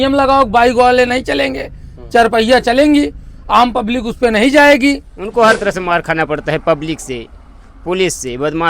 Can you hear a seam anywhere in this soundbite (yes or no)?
yes